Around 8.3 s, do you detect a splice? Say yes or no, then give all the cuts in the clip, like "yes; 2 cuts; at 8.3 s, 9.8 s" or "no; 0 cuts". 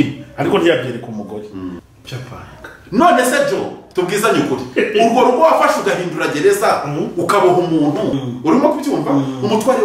yes; 2 cuts; at 1.8 s, 8.3 s